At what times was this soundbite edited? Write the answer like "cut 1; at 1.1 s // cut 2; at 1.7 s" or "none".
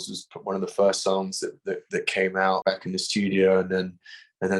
cut 1; at 2.6 s